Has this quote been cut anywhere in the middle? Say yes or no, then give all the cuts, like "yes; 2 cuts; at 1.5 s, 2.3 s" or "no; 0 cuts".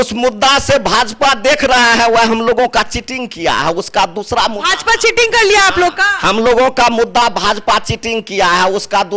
no; 0 cuts